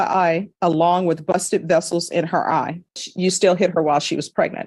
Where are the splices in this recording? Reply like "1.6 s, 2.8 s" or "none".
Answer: 3.1 s